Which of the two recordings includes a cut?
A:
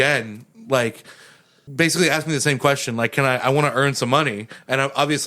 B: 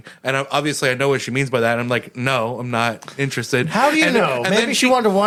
A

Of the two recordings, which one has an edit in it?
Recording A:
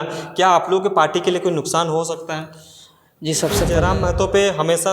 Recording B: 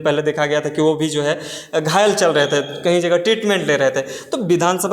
A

